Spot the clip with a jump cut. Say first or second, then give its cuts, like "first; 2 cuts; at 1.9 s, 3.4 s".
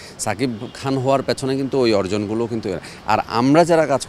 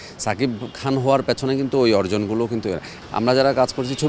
second; 1 cut; at 2.9 s